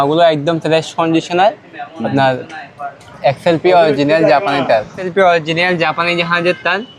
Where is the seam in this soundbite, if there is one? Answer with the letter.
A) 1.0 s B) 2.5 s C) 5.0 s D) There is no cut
C